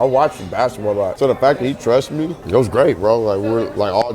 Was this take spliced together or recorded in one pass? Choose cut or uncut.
cut